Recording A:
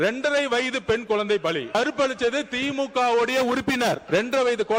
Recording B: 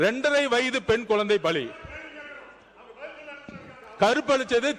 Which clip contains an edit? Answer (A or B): A